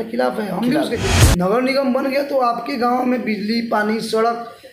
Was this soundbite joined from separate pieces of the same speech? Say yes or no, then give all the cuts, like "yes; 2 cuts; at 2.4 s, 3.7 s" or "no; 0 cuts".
yes; 1 cut; at 1.1 s